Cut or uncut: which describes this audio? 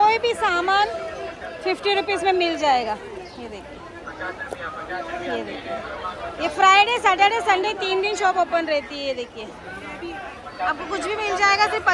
uncut